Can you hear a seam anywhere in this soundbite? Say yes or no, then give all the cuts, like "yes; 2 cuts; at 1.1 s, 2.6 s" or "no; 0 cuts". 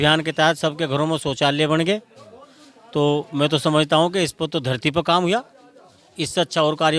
no; 0 cuts